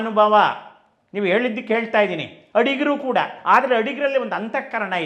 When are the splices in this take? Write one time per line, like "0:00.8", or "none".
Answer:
none